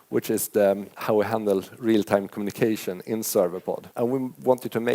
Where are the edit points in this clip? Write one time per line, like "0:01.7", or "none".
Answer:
0:00.9
0:03.9